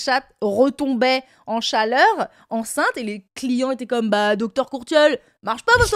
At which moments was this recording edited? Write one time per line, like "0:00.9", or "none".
none